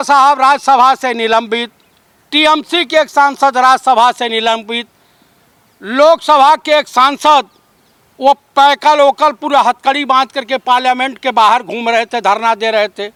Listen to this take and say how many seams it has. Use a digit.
0